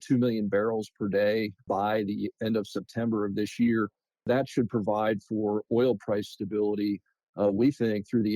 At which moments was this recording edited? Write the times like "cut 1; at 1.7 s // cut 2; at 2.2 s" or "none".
cut 1; at 1.6 s // cut 2; at 4.3 s